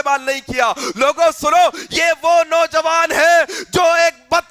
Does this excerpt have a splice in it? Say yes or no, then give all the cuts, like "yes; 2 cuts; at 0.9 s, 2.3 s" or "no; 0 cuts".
no; 0 cuts